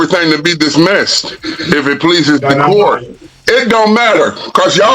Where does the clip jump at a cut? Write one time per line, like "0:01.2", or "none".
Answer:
0:03.0